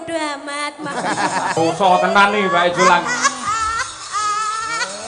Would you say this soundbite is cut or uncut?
cut